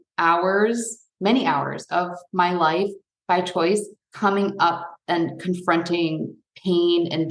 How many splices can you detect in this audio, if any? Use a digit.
1